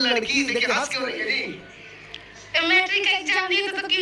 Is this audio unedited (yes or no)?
yes